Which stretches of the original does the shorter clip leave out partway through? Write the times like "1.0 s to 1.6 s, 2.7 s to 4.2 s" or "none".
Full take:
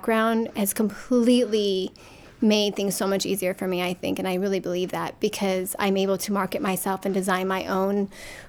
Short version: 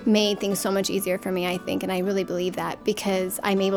none